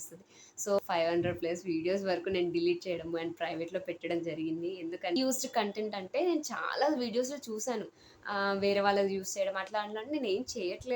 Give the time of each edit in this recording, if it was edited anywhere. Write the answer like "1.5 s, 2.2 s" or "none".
0.8 s, 5.2 s